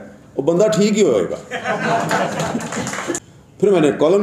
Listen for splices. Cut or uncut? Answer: cut